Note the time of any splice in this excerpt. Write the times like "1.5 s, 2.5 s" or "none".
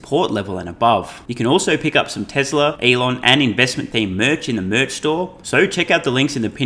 1.2 s, 2.8 s, 5.4 s